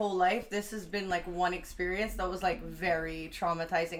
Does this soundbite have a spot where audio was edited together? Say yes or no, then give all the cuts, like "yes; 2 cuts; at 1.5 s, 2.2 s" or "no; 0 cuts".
no; 0 cuts